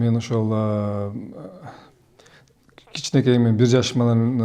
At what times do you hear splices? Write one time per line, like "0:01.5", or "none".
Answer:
none